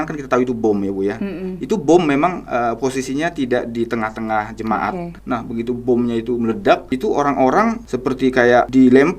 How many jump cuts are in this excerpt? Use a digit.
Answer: 3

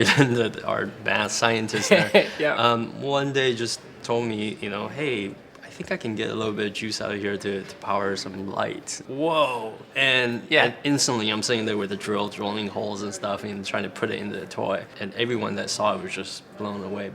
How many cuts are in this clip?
2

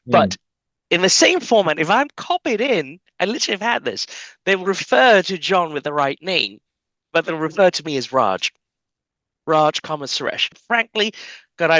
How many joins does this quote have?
1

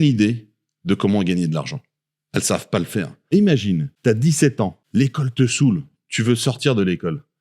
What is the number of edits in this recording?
3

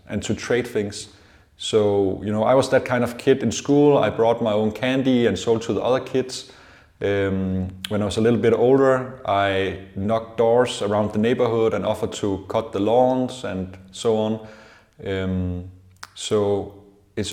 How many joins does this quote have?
0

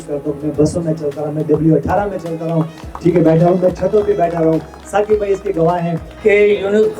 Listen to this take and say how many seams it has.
1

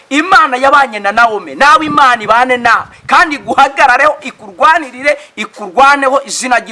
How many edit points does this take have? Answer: 0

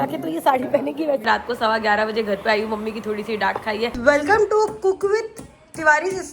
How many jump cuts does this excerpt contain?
2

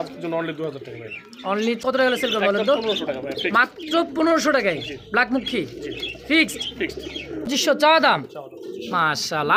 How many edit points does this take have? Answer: 2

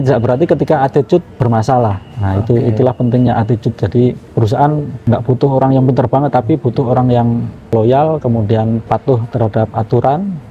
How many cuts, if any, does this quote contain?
5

